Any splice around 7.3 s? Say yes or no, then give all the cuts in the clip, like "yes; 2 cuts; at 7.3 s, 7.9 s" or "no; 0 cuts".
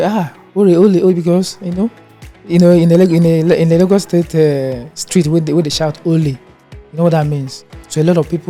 no; 0 cuts